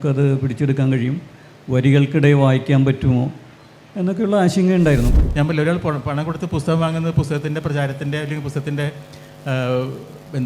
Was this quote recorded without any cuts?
no; 1 cut; at 5.1 s

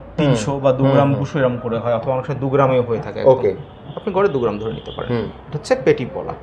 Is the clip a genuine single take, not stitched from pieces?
yes; 0 cuts

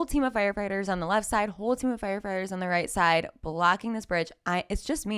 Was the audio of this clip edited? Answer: no; 0 cuts

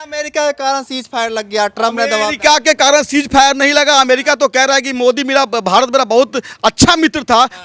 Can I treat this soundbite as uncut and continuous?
yes; 0 cuts

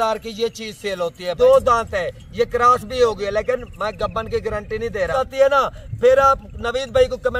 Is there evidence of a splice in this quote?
yes; 2 cuts; at 1.2 s, 5.1 s

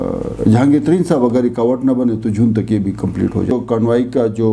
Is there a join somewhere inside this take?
yes; 1 cut; at 3.5 s

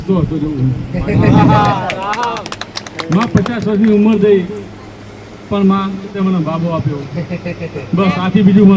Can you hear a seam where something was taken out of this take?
yes; 1 cut; at 6.1 s

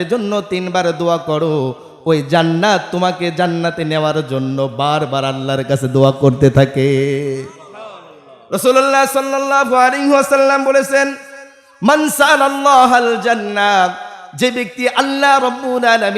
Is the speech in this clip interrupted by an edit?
no; 0 cuts

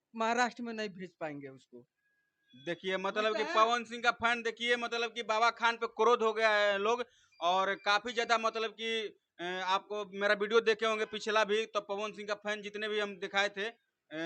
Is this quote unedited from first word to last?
yes; 0 cuts

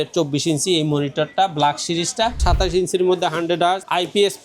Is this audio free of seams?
no; 1 cut; at 2.4 s

